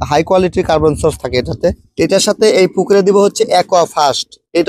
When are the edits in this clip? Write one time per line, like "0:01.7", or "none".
0:01.9